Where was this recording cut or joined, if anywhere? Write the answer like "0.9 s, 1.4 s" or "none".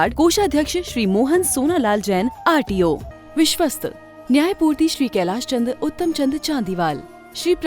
3.1 s